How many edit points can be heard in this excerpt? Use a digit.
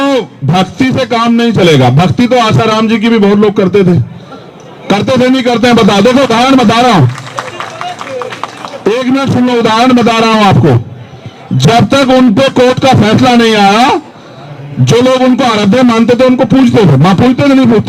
0